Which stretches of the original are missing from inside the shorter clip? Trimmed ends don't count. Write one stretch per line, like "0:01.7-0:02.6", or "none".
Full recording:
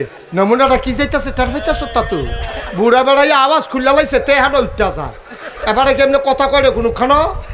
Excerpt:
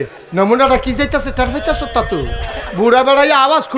none